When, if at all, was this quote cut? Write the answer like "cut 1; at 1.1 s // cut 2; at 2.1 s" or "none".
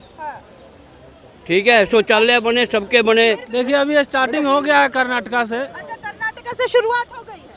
cut 1; at 3.5 s

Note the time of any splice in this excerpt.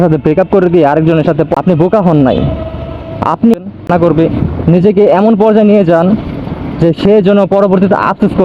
cut 1; at 1.5 s // cut 2; at 3.6 s

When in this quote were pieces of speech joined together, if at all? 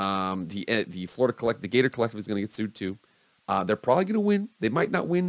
none

